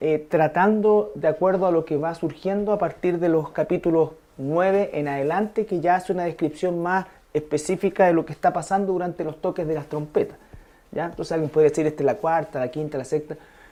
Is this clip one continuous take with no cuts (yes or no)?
yes